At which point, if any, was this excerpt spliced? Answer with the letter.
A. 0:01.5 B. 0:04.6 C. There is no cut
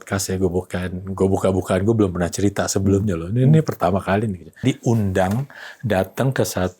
B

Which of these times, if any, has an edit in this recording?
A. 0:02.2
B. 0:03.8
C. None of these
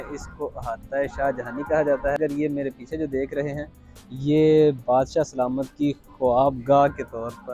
A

